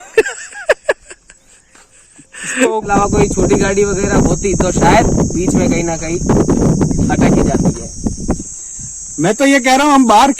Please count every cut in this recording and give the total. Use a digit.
2